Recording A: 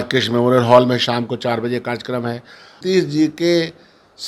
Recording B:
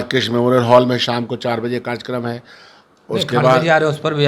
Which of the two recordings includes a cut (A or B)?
A